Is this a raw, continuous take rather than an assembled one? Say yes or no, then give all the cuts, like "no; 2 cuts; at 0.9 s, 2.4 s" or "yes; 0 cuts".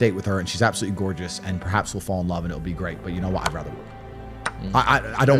yes; 0 cuts